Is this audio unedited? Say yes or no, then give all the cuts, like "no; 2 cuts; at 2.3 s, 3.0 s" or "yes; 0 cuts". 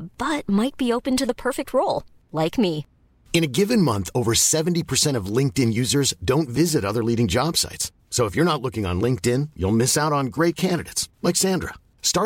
yes; 0 cuts